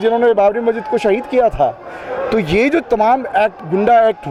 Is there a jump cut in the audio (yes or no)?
no